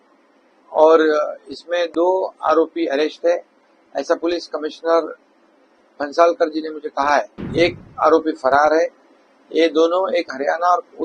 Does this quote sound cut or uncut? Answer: cut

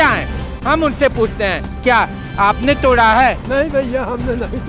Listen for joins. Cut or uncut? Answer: cut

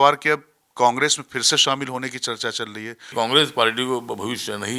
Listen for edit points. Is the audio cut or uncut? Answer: cut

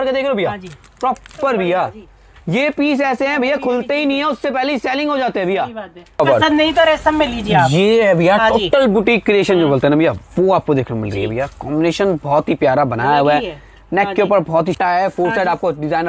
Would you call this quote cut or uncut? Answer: cut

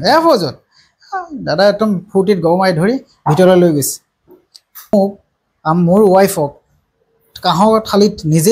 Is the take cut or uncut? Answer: cut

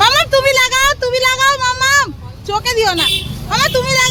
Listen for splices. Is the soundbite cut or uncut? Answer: uncut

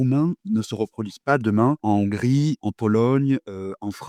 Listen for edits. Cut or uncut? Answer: uncut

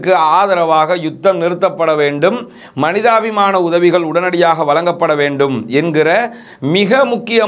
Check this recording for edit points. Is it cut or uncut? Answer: uncut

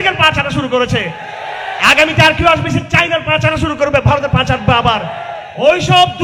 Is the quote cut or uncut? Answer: uncut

